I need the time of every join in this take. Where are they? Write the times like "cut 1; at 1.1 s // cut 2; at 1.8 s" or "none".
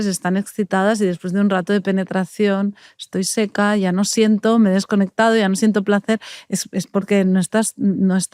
none